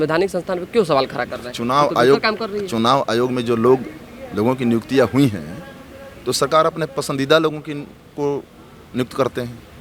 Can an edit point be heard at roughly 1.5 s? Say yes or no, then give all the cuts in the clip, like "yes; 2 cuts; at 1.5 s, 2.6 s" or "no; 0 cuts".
no; 0 cuts